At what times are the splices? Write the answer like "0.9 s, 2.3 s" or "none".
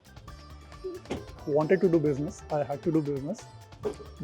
1.4 s